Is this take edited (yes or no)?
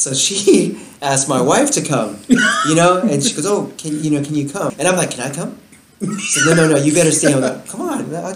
yes